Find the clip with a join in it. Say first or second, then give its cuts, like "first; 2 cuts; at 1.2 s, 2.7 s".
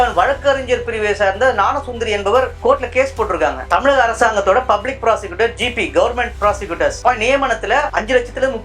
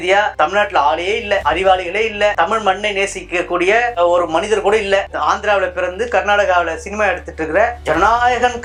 first; 3 cuts; at 2.5 s, 3.6 s, 7.0 s